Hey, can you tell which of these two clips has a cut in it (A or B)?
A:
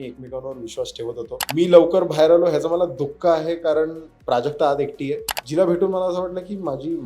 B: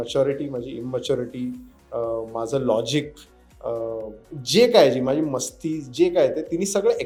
A